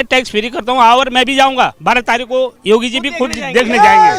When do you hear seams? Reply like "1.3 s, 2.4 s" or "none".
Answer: none